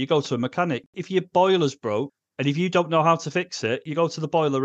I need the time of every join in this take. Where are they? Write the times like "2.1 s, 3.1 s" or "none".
0.9 s, 2.2 s, 3.9 s